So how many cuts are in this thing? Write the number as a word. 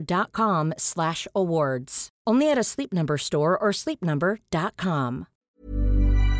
one